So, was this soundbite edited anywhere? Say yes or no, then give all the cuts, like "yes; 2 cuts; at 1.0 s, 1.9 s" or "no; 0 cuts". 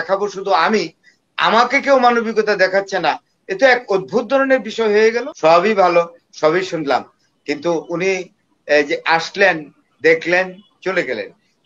yes; 1 cut; at 5.3 s